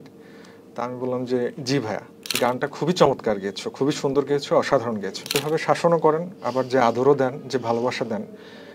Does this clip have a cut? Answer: yes; 2 cuts; at 2.4 s, 5.3 s

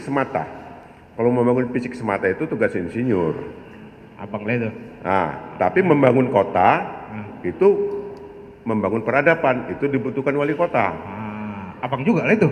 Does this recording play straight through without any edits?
yes; 0 cuts

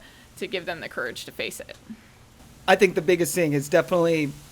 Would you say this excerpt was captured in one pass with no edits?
no; 1 cut; at 2.5 s

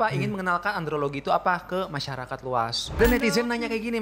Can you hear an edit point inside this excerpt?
yes; 1 cut; at 3.0 s

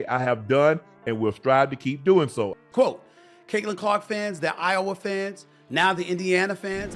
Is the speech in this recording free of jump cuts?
no; 1 cut; at 2.6 s

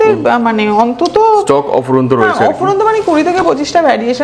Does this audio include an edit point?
no; 0 cuts

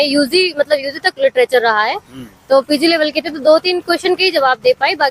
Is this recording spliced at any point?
no; 0 cuts

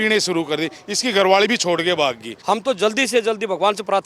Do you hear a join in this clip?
yes; 1 cut; at 2.3 s

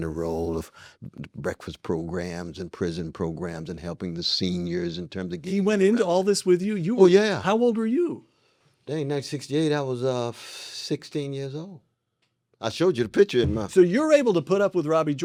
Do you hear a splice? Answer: no; 0 cuts

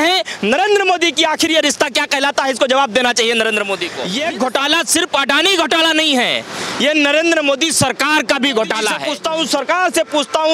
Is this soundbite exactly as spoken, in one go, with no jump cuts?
no; 2 cuts; at 4.0 s, 9.1 s

